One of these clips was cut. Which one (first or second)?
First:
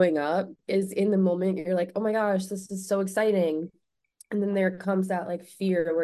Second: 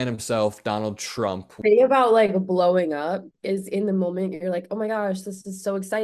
second